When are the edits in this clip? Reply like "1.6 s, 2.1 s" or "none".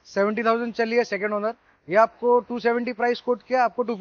none